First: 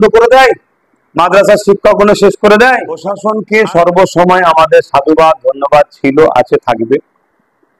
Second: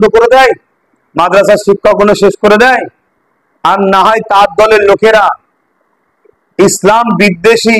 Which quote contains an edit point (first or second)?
first